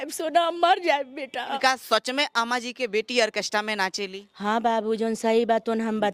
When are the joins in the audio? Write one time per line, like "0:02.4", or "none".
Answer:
0:01.5

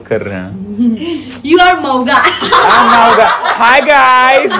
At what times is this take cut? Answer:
none

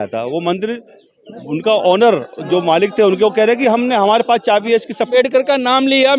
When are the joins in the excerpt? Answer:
0:05.1

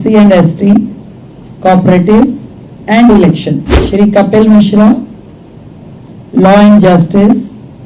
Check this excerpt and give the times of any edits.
0:03.7

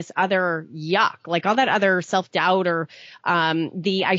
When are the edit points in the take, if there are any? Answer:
none

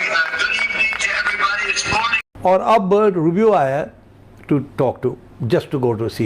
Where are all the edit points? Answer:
0:02.3

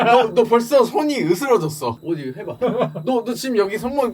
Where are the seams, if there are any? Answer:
0:02.0

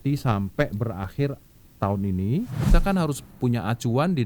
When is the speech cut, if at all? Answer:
0:02.7

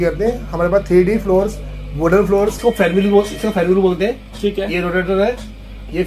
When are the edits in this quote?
0:02.6

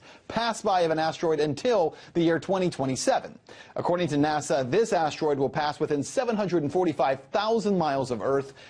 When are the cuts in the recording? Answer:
none

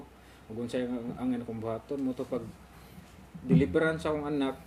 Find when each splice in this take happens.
none

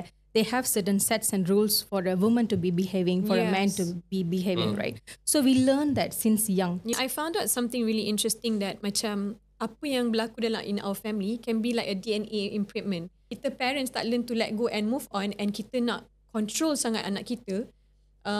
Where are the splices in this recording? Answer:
0:06.9
0:13.3

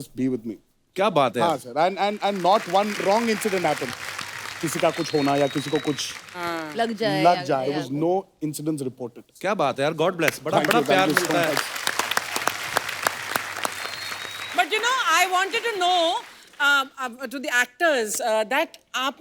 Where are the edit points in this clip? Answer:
0:14.5

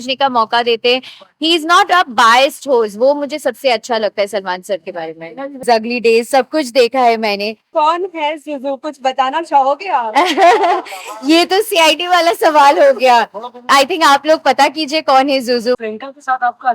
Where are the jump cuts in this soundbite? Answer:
0:05.6
0:07.7
0:13.6
0:15.8

